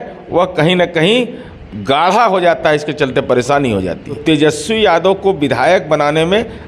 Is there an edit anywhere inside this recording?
yes; 1 cut; at 4.2 s

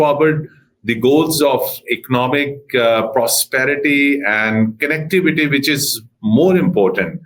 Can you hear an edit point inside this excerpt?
no; 0 cuts

